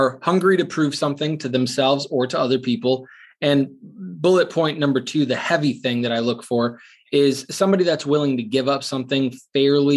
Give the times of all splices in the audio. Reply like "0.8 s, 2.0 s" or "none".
none